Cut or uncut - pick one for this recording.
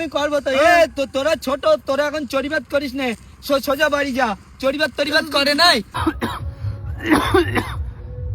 cut